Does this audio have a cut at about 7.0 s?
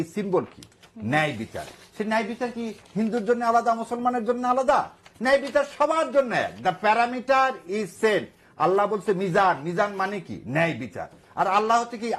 no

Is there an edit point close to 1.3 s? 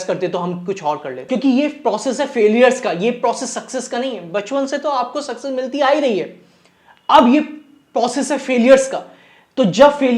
yes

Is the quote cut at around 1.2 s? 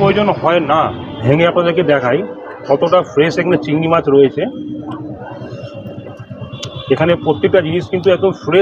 yes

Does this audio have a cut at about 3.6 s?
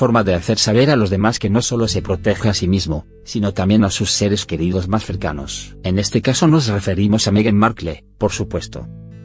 yes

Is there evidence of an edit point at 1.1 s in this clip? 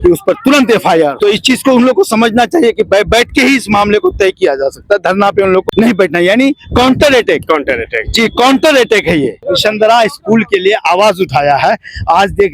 yes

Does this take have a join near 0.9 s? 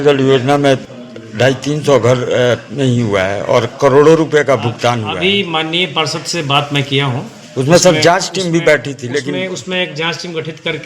yes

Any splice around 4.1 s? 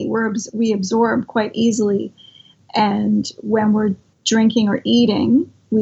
yes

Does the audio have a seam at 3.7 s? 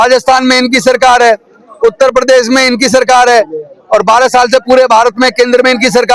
no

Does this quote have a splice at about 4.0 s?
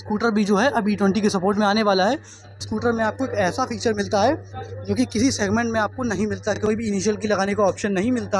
no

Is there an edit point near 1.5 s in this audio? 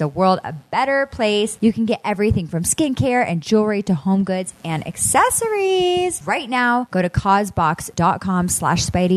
yes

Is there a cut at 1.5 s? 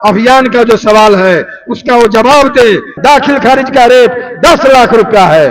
no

